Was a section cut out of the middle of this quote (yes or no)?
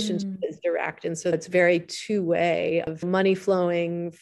yes